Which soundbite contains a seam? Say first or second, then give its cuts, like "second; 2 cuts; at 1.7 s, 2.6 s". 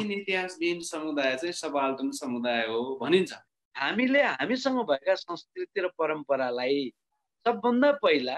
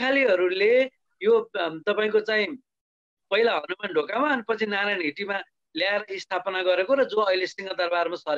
first; 1 cut; at 3.5 s